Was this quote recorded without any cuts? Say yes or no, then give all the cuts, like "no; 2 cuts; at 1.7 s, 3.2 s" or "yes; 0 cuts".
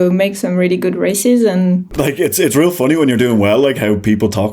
no; 1 cut; at 1.9 s